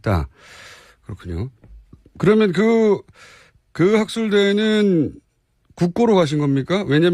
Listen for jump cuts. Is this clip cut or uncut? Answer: cut